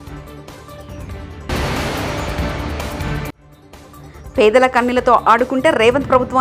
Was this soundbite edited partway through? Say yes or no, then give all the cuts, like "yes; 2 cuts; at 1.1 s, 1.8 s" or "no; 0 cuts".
no; 0 cuts